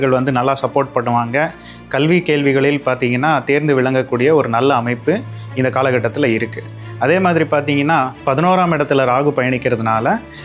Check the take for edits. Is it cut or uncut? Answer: cut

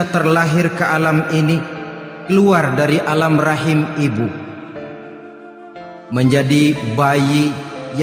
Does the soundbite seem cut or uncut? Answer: cut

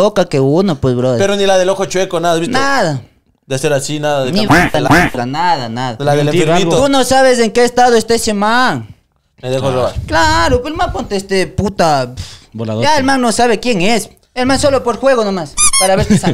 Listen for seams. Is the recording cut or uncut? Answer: uncut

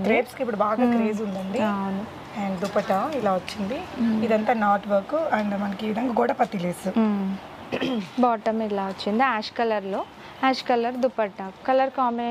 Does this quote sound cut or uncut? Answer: uncut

